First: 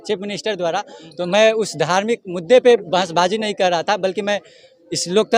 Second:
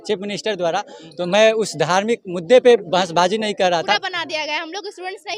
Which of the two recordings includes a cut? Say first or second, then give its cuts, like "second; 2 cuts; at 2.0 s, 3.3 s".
second; 1 cut; at 3.9 s